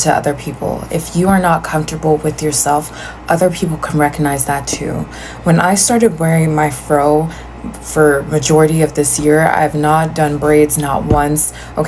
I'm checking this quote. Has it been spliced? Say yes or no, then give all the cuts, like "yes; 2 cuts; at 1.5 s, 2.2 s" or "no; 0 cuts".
no; 0 cuts